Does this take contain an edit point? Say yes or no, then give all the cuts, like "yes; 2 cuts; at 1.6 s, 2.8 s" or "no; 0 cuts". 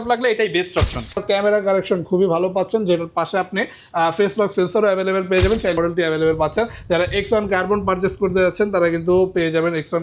yes; 2 cuts; at 1.2 s, 5.8 s